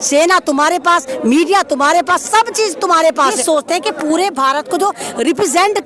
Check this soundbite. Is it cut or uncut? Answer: cut